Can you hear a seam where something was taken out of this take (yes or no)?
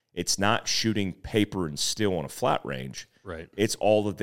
no